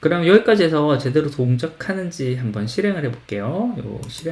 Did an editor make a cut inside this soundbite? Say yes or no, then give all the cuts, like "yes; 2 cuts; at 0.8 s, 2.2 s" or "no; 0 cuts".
no; 0 cuts